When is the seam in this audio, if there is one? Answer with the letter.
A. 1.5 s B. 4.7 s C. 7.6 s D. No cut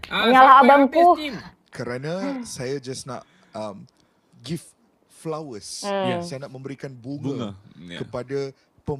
A